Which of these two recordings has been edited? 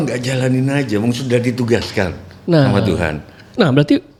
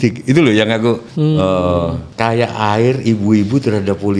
second; 2 cuts; at 1.1 s, 2.0 s

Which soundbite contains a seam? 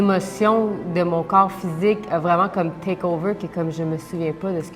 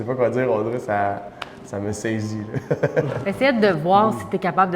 second; 1 cut; at 3.1 s

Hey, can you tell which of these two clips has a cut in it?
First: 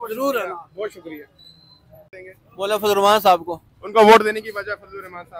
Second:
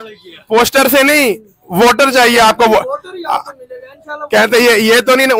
first; 1 cut; at 1.5 s

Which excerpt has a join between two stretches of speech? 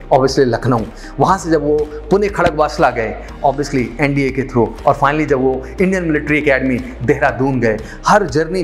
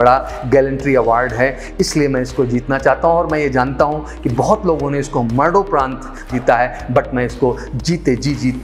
second; 1 cut; at 6.3 s

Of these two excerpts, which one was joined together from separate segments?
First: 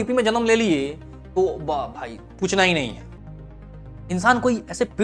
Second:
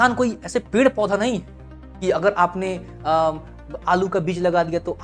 first; 1 cut; at 3.0 s

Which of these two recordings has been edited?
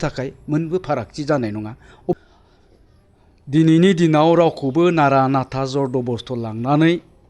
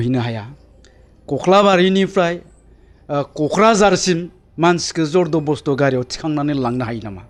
first; 1 cut; at 2.1 s

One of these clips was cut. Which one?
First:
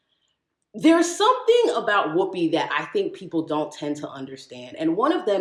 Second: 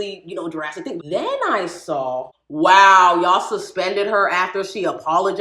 second; 2 cuts; at 1.0 s, 2.4 s

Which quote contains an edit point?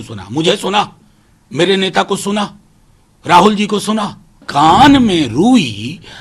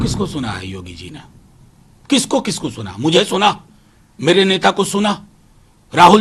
first; 1 cut; at 4.4 s

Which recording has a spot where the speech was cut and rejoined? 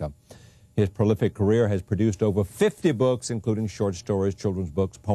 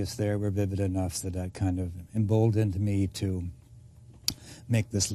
second; 1 cut; at 3.5 s

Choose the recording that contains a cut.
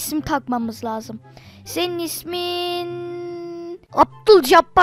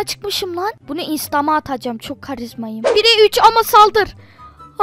second; 1 cut; at 2.8 s

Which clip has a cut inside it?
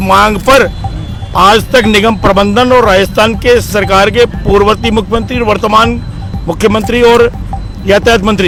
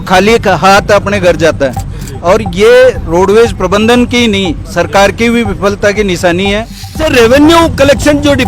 second; 1 cut; at 7.0 s

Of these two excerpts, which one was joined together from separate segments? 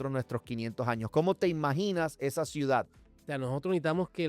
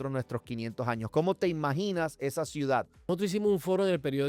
first; 1 cut; at 2.9 s

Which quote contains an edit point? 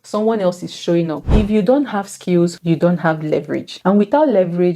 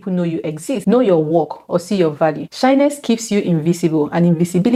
first; 1 cut; at 1.2 s

